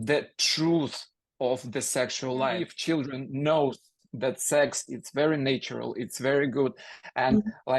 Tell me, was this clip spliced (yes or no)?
yes